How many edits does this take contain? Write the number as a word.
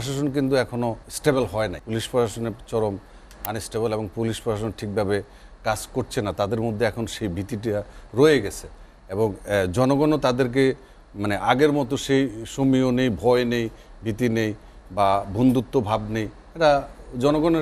two